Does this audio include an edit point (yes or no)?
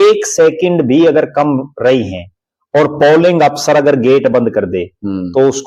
no